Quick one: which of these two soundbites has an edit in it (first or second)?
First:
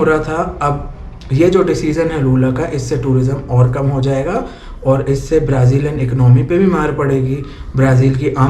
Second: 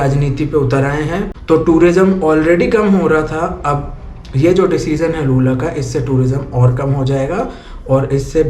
second